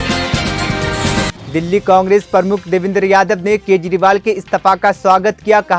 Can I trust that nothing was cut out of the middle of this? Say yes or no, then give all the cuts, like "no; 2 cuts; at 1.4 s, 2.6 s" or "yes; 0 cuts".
no; 1 cut; at 1.4 s